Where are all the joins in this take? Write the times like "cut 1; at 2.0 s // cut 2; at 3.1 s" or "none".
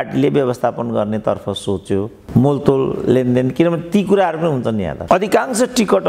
cut 1; at 5.0 s

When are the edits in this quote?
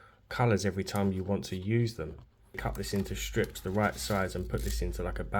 cut 1; at 2.6 s

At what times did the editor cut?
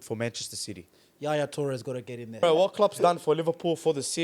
cut 1; at 2.4 s

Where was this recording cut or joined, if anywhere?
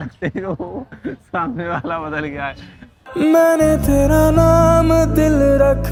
none

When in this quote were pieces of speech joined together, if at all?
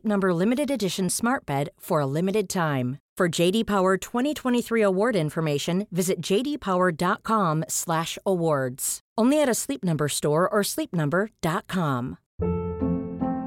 cut 1; at 12.2 s

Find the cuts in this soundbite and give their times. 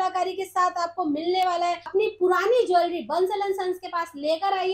cut 1; at 1.8 s

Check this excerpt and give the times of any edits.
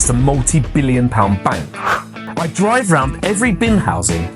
cut 1; at 2.0 s

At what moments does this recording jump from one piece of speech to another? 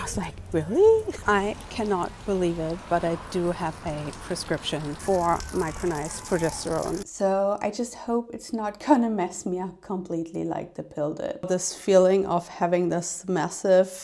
cut 1; at 1.1 s // cut 2; at 5.0 s // cut 3; at 7.1 s // cut 4; at 11.5 s

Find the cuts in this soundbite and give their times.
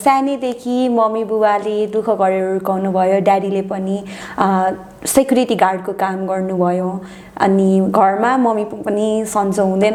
none

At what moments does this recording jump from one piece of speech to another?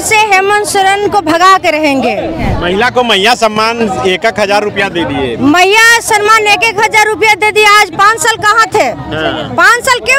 cut 1; at 2.5 s

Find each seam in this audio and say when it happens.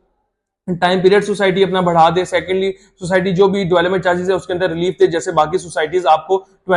none

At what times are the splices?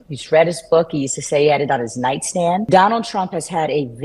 cut 1; at 2.6 s

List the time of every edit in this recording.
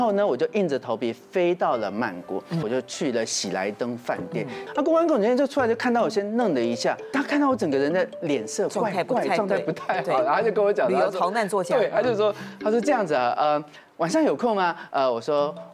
cut 1; at 2.6 s // cut 2; at 4.6 s // cut 3; at 7.0 s

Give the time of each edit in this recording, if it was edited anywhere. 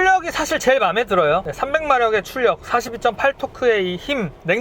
cut 1; at 1.5 s

